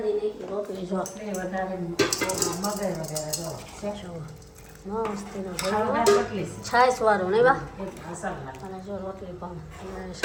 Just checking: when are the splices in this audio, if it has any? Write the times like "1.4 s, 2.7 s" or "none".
none